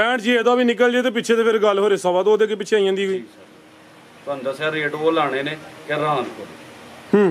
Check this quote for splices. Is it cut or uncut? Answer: uncut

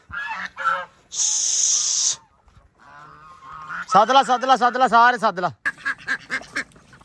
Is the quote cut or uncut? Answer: cut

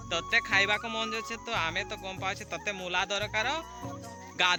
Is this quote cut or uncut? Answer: uncut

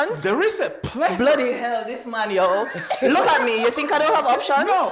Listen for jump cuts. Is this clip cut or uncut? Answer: uncut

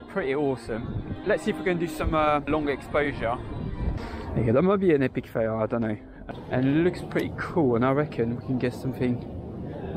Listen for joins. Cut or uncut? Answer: cut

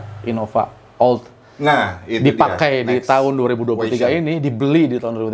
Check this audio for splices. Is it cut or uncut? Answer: uncut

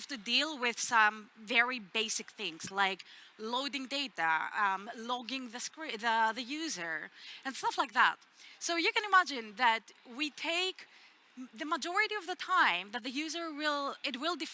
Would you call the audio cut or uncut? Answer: uncut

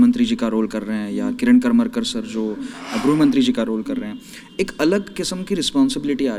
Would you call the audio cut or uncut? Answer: uncut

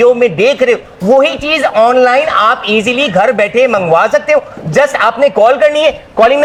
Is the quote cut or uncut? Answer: uncut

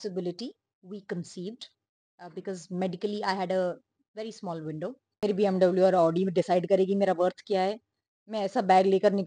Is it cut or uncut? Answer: cut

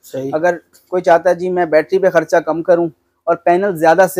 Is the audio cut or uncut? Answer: uncut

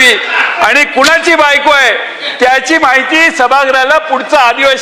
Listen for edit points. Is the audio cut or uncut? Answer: uncut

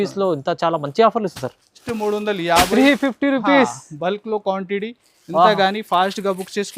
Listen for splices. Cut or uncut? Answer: cut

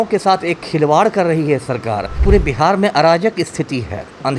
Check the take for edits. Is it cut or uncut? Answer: cut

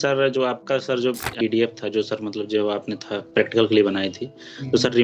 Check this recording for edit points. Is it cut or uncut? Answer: cut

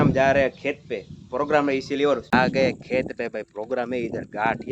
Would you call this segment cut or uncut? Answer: cut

